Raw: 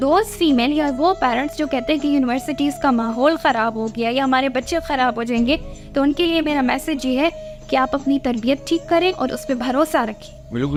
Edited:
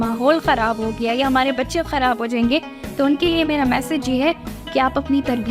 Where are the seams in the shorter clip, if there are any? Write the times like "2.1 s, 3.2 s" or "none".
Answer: none